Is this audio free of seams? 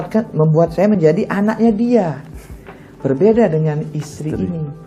yes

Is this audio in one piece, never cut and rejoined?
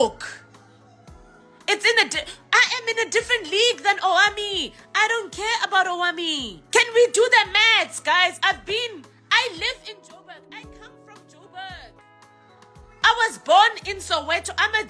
no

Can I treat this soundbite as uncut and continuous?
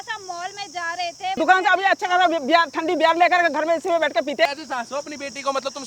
no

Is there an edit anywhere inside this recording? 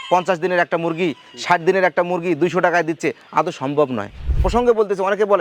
yes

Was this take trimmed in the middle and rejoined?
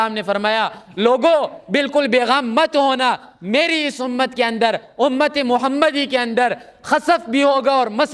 no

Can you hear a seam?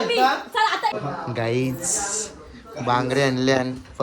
yes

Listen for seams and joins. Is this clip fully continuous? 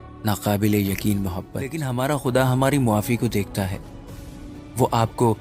no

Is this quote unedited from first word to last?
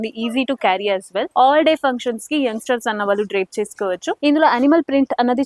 no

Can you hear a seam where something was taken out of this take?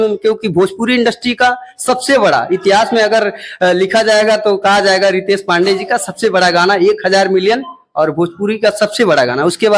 no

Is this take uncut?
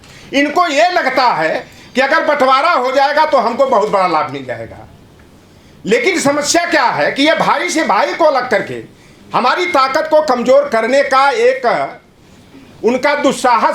yes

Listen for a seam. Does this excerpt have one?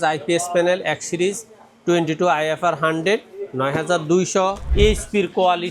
yes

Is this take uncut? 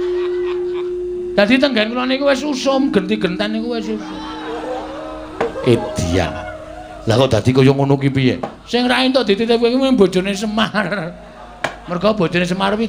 yes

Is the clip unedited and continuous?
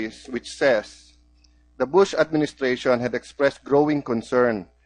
no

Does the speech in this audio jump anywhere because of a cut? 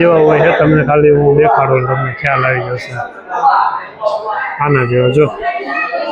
no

